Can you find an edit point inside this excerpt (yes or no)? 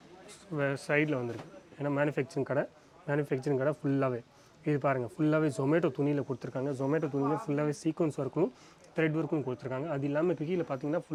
no